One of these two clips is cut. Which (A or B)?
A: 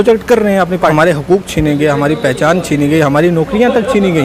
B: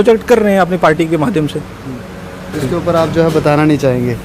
A